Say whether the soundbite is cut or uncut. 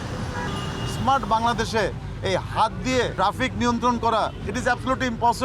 cut